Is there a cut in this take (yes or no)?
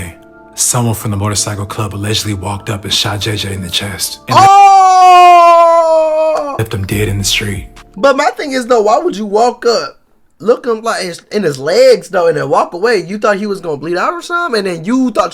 no